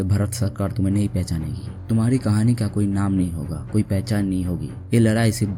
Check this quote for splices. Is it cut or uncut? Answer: uncut